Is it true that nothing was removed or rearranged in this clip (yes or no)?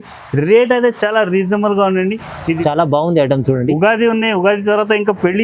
no